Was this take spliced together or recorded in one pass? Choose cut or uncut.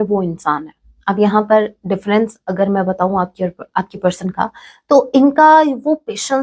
uncut